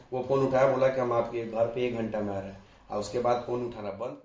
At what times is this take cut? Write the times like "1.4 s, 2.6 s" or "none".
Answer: none